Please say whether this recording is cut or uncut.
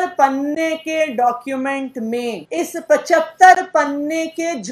cut